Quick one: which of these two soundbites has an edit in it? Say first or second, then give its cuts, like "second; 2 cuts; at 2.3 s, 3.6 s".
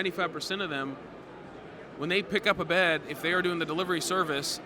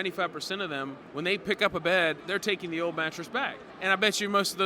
second; 3 cuts; at 1.0 s, 2.2 s, 3.6 s